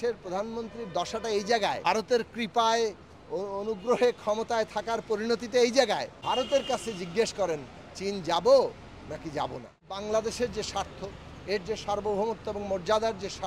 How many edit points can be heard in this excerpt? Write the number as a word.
three